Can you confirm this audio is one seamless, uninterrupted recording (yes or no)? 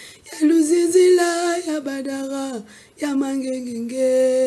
yes